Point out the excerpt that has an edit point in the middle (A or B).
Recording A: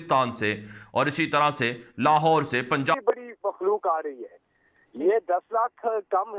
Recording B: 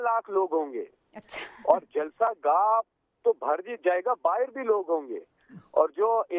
A